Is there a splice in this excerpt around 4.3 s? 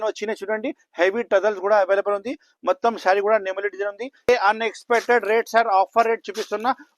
yes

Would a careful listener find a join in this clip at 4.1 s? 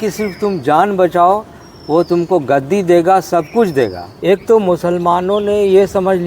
yes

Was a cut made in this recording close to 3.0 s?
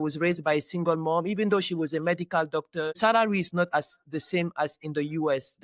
yes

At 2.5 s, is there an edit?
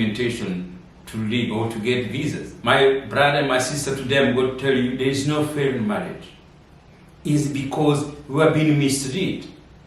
yes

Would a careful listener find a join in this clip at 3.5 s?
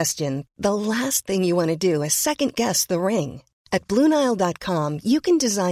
no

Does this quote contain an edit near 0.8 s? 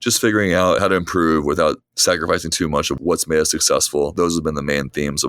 yes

